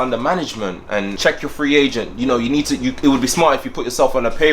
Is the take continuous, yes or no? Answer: no